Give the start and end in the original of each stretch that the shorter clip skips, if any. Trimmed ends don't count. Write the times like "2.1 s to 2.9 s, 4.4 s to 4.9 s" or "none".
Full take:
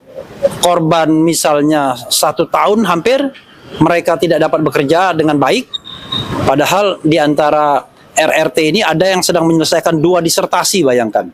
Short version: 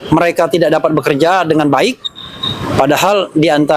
none